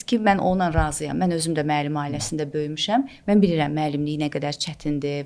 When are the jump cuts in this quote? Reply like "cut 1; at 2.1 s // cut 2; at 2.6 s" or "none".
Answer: none